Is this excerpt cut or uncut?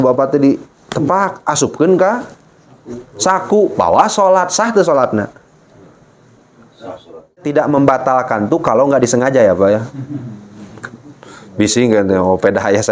cut